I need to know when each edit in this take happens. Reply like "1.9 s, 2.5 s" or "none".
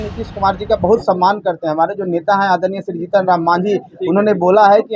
none